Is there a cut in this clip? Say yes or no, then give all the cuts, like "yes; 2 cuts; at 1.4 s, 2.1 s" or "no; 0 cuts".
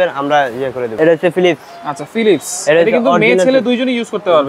yes; 1 cut; at 0.9 s